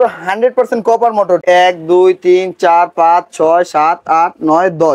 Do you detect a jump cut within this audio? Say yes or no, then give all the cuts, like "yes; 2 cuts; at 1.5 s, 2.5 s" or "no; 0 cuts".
yes; 1 cut; at 1.4 s